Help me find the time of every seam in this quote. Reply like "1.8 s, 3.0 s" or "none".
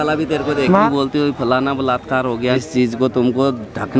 0.9 s, 2.5 s